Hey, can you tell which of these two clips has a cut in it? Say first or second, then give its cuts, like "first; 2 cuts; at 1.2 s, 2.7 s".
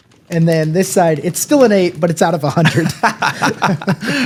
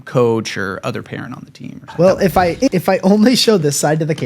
second; 1 cut; at 1.9 s